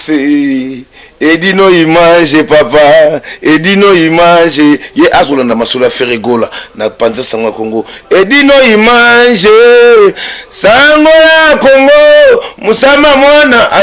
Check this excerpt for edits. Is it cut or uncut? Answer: uncut